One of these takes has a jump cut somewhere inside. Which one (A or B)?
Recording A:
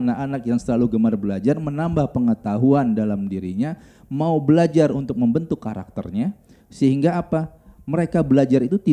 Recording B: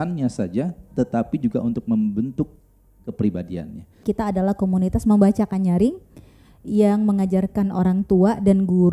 B